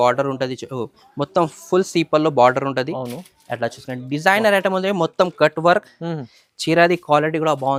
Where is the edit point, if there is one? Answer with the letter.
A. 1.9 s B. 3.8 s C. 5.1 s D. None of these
D